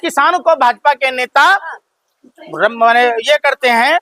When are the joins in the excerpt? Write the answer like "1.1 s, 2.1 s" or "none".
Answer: none